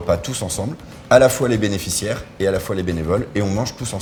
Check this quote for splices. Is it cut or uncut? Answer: uncut